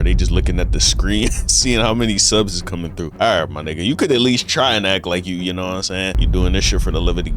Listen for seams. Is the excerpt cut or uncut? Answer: cut